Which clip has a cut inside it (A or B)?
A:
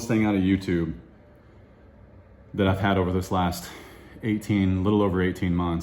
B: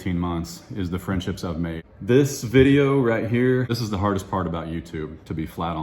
B